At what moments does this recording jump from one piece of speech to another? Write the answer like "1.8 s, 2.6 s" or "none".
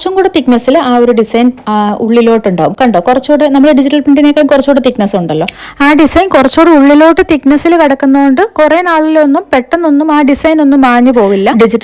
none